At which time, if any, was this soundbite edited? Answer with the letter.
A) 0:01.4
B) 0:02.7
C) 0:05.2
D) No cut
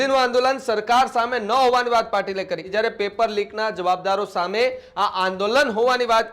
B